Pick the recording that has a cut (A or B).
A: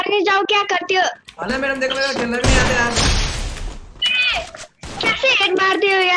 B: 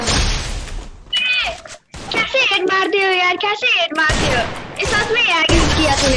A